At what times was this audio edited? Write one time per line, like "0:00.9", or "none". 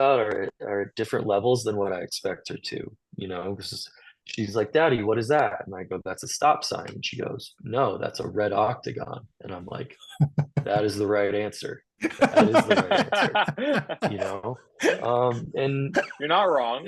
none